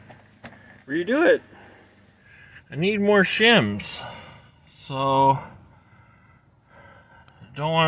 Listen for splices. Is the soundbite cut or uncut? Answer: uncut